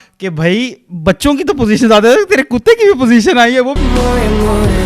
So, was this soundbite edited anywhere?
no; 0 cuts

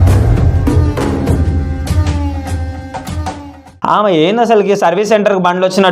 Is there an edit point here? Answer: yes; 1 cut; at 3.8 s

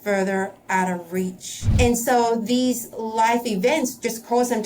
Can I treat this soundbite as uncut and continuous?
no; 1 cut; at 1.7 s

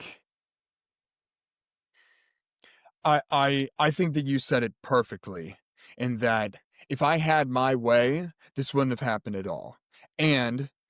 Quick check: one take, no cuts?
yes; 0 cuts

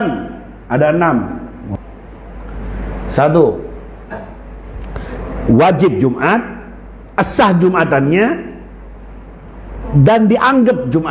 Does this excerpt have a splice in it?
yes; 1 cut; at 1.6 s

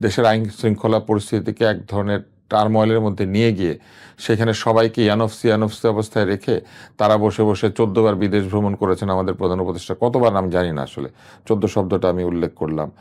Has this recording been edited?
no; 0 cuts

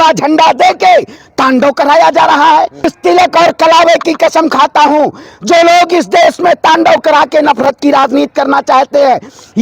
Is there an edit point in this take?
yes; 1 cut; at 2.9 s

